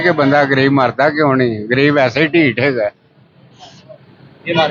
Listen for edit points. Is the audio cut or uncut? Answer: uncut